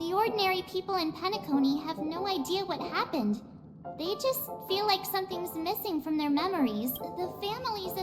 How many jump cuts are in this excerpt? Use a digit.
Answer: 1